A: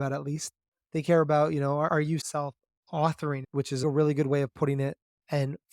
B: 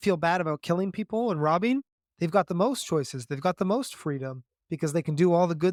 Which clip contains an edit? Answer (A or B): A